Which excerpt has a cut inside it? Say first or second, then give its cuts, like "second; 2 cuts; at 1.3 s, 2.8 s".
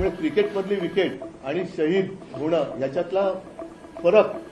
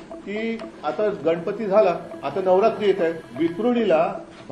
second; 2 cuts; at 2.1 s, 3.2 s